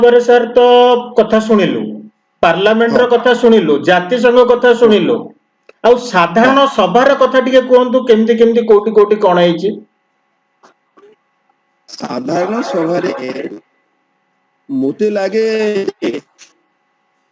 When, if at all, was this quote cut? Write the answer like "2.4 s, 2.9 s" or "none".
none